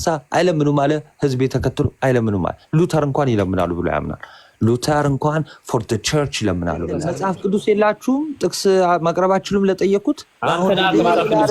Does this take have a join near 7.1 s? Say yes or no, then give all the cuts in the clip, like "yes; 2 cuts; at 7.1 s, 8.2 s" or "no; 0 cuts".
yes; 1 cut; at 7.1 s